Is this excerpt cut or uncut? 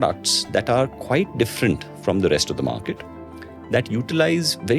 uncut